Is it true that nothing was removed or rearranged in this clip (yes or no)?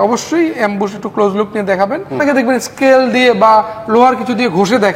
no